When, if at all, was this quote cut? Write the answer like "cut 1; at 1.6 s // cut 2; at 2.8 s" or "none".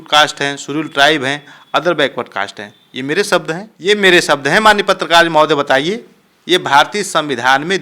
cut 1; at 3.7 s